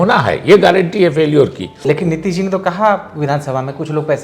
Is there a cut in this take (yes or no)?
yes